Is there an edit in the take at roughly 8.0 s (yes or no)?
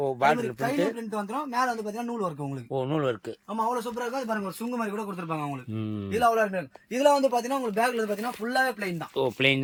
no